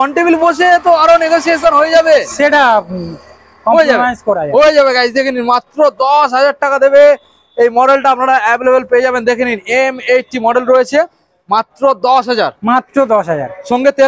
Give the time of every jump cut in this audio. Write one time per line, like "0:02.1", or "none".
none